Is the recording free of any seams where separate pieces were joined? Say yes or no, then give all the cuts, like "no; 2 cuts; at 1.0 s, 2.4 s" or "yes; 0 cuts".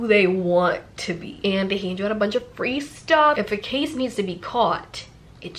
no; 2 cuts; at 1.3 s, 3.4 s